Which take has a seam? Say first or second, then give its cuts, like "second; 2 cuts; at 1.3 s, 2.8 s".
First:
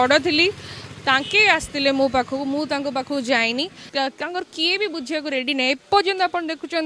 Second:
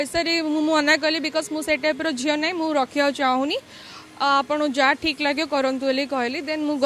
first; 1 cut; at 3.8 s